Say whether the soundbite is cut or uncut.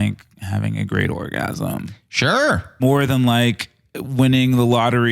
cut